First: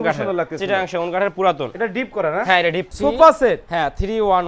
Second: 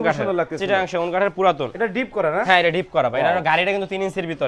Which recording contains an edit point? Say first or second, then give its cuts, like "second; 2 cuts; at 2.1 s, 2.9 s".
first; 1 cut; at 2.9 s